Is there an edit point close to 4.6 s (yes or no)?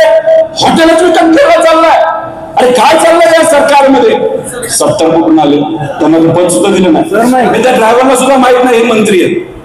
yes